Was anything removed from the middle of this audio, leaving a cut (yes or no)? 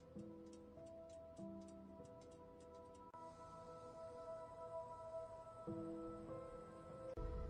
no